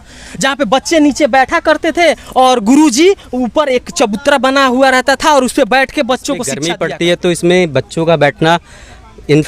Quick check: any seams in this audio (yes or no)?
yes